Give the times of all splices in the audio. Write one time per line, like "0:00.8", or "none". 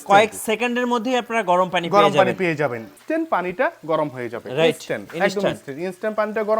0:02.9